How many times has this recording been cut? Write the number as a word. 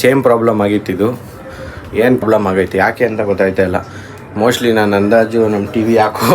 one